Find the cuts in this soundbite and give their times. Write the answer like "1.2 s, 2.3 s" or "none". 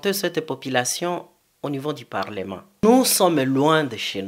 2.6 s